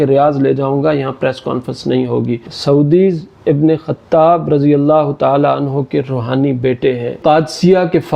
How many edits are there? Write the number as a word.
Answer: two